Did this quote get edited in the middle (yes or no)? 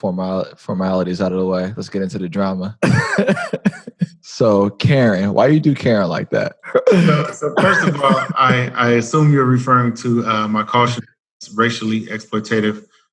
yes